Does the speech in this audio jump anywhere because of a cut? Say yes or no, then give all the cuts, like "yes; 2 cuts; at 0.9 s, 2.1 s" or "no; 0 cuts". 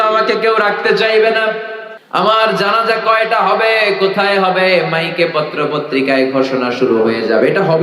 no; 0 cuts